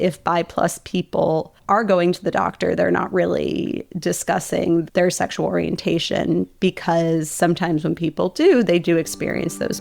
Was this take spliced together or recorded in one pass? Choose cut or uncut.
uncut